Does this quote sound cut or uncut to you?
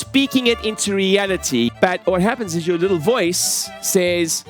cut